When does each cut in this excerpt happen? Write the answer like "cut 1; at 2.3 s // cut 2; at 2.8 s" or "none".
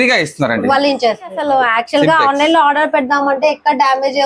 cut 1; at 1.4 s